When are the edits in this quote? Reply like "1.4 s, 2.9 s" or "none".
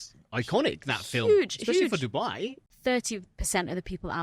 2.6 s